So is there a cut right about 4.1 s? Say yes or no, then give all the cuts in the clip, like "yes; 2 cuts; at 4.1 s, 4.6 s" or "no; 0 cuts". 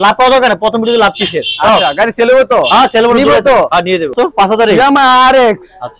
yes; 1 cut; at 4.1 s